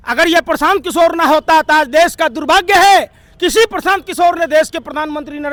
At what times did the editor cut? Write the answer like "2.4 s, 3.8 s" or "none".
none